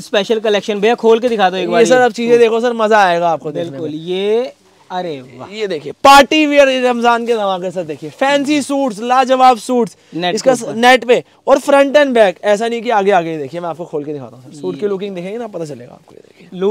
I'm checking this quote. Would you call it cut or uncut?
uncut